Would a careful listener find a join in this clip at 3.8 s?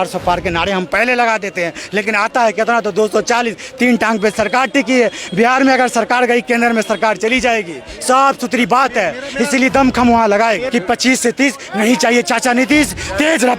no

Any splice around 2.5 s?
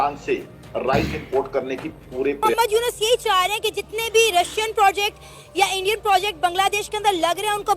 yes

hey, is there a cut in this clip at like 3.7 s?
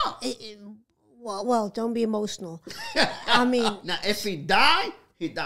yes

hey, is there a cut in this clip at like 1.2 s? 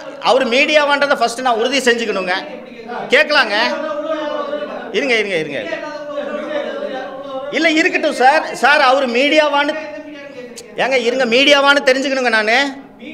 no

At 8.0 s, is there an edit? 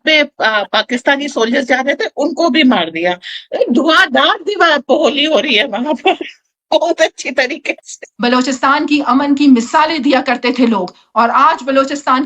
yes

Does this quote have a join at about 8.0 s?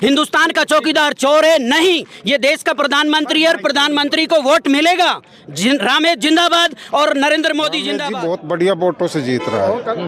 yes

